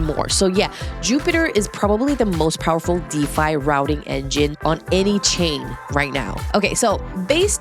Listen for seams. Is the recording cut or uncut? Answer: uncut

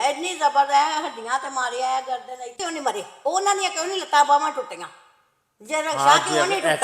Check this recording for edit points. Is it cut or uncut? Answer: cut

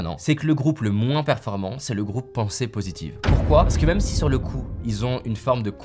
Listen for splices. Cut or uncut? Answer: uncut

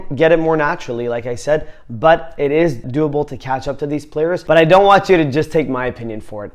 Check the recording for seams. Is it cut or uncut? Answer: cut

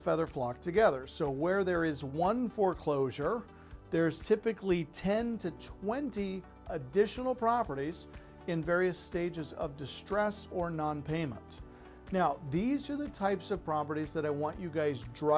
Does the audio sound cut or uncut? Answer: uncut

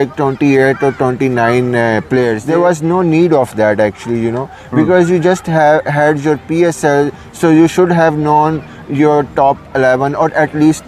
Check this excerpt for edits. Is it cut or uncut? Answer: uncut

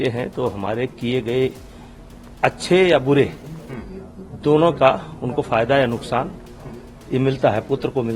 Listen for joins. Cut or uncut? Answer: uncut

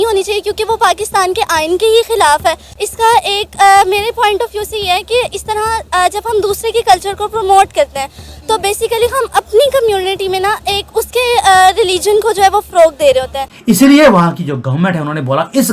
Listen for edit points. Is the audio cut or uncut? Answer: cut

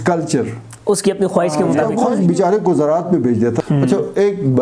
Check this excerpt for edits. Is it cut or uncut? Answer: cut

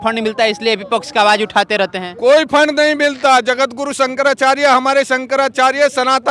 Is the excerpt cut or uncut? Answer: uncut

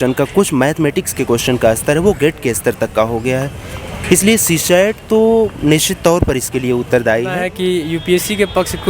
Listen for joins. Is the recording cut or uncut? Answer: cut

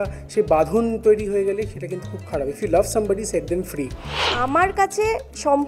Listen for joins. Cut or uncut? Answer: cut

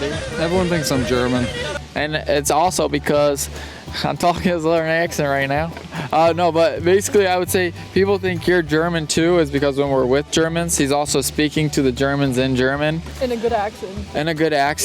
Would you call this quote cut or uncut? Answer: uncut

